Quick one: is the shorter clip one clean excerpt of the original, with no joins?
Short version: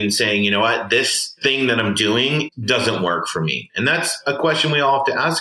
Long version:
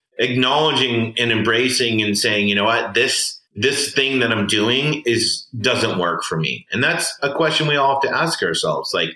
no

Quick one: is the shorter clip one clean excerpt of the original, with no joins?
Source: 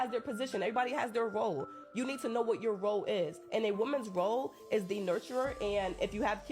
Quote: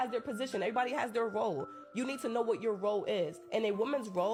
yes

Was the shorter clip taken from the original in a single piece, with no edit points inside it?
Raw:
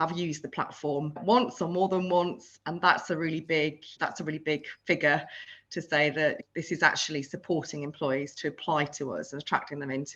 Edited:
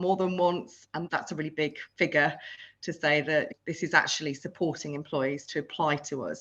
no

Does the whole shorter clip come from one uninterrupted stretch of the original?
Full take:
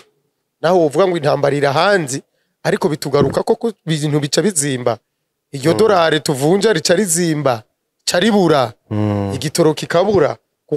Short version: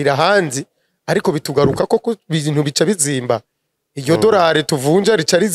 yes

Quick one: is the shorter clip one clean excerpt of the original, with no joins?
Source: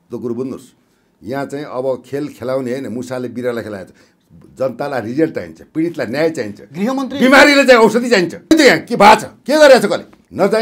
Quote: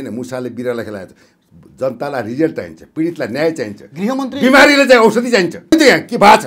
yes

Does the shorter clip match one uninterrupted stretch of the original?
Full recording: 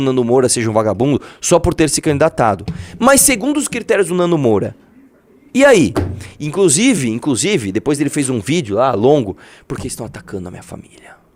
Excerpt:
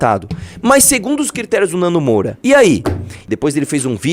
no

